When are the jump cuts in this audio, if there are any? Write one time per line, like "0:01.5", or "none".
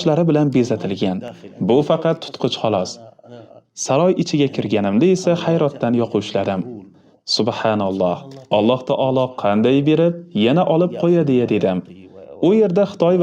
none

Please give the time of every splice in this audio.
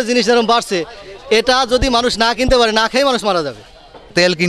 none

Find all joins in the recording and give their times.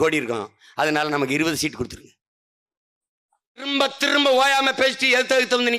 0:03.7

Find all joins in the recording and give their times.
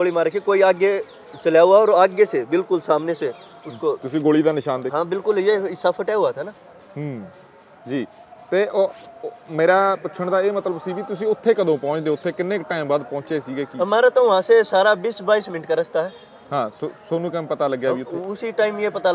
none

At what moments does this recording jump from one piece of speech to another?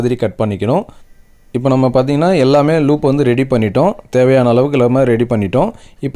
0:01.0

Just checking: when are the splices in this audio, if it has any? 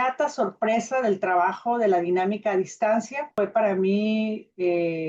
0:03.3

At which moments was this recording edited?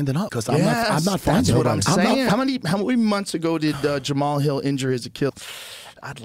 0:02.3
0:05.3

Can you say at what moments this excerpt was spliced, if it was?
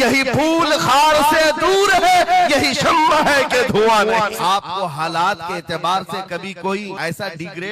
0:04.4
0:06.9

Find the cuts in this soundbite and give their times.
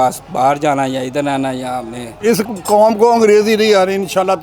0:02.1

